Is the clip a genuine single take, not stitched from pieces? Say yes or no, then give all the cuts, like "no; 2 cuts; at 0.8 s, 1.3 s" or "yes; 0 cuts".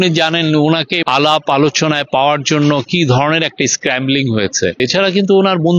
no; 2 cuts; at 1.0 s, 4.8 s